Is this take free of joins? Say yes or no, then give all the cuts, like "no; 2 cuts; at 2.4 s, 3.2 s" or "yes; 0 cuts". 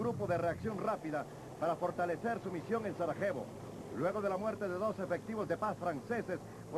yes; 0 cuts